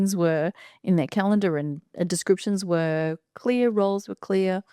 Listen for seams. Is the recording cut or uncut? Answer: uncut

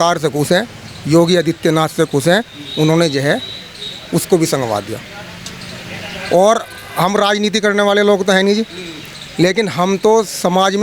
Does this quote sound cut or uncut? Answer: uncut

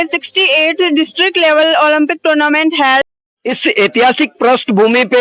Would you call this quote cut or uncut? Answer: cut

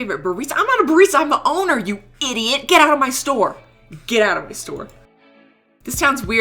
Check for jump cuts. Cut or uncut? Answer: uncut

